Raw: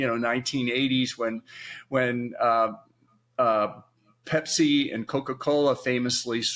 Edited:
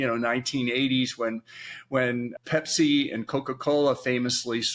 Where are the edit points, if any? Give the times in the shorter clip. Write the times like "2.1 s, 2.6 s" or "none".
2.3 s